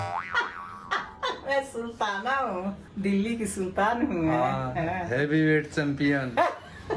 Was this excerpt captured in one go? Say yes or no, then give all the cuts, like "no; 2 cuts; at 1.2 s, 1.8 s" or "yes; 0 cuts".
yes; 0 cuts